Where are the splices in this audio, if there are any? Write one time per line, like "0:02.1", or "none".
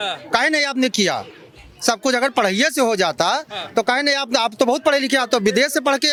none